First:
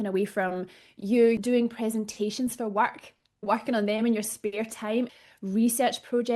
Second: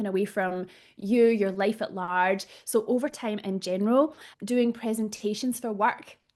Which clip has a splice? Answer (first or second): first